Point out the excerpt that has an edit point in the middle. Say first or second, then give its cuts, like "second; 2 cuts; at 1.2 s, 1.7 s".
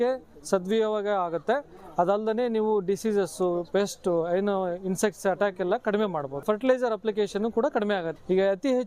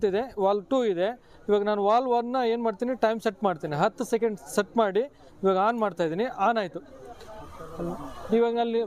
first; 2 cuts; at 6.4 s, 8.1 s